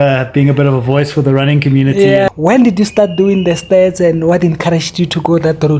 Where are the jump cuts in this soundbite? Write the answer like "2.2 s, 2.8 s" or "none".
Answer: 2.3 s